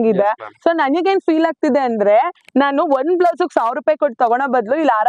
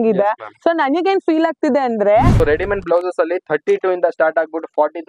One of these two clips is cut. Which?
second; 1 cut; at 2.3 s

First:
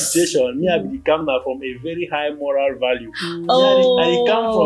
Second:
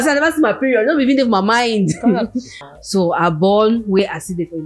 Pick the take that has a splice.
second; 1 cut; at 2.6 s

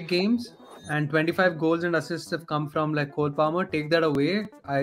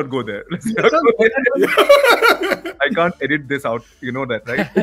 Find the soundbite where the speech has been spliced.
second; 1 cut; at 2.7 s

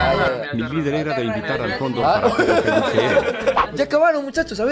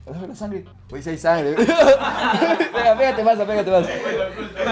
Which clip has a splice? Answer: first; 1 cut; at 3.6 s

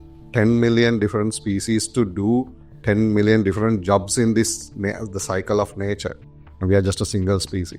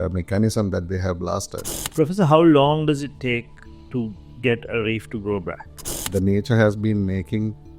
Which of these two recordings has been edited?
second; 2 cuts; at 1.8 s, 6.0 s

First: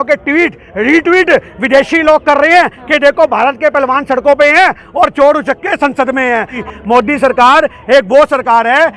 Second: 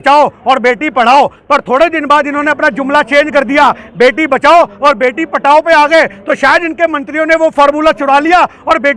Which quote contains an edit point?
first; 1 cut; at 6.6 s

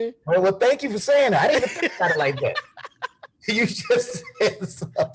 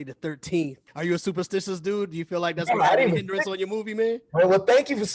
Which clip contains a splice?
second; 1 cut; at 0.9 s

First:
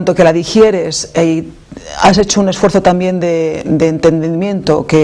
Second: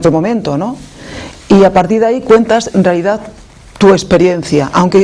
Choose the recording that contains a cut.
first; 1 cut; at 2.0 s

